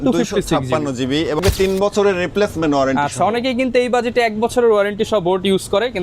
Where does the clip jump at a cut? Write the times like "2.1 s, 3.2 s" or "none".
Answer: 1.4 s